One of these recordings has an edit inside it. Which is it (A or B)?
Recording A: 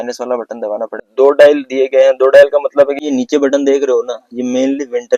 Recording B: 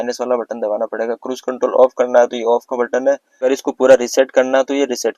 A